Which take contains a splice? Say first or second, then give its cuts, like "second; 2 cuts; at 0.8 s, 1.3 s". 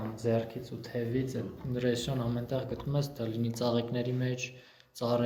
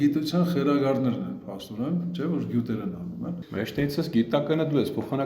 second; 1 cut; at 3.4 s